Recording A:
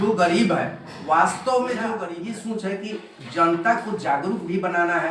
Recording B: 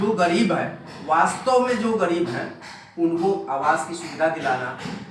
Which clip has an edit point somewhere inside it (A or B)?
A